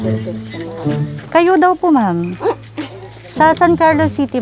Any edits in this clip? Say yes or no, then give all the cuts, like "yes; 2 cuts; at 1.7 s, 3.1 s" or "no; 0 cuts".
no; 0 cuts